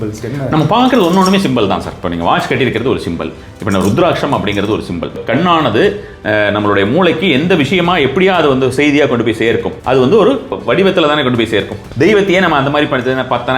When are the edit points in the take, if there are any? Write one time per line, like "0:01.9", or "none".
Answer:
0:05.2
0:09.7
0:10.6
0:11.8